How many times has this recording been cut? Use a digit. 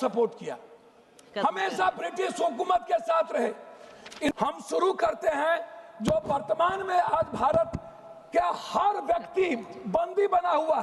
1